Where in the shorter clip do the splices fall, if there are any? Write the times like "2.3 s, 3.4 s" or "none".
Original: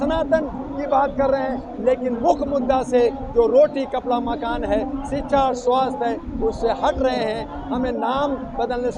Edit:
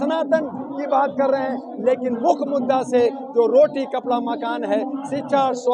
none